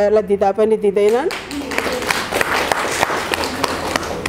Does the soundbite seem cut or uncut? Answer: uncut